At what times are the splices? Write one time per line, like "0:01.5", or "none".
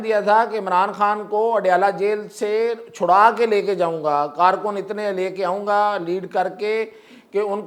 none